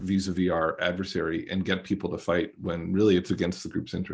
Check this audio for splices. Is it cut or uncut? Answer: uncut